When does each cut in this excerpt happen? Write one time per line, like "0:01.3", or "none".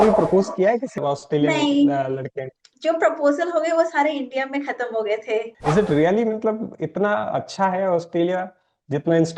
0:01.0
0:05.5